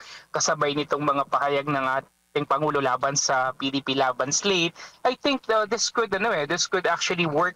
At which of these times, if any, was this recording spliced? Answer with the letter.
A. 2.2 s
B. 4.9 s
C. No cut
A